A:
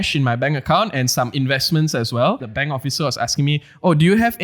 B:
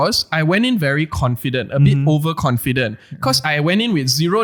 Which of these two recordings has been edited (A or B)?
A